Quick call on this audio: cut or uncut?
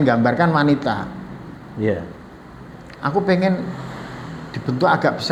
uncut